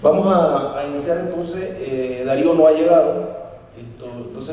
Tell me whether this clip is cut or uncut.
cut